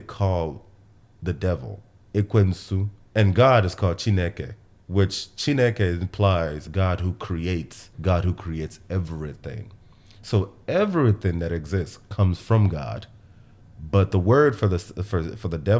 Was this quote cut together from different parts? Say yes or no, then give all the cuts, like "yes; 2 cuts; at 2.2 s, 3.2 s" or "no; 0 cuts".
yes; 3 cuts; at 3.0 s, 6.6 s, 7.9 s